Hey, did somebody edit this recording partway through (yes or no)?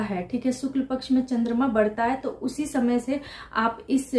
no